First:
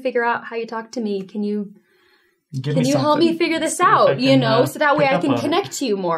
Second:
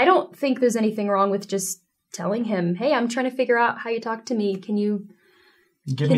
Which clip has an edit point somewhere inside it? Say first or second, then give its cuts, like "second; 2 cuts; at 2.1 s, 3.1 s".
first; 1 cut; at 4.2 s